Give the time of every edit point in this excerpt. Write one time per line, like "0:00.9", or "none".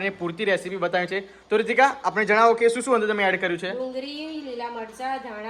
none